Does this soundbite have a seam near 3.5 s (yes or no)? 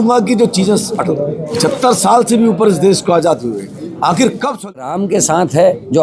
no